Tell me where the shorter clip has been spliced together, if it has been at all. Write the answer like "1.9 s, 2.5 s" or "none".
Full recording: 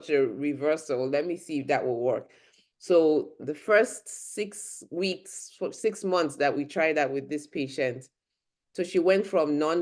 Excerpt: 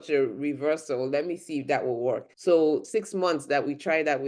2.3 s, 2.9 s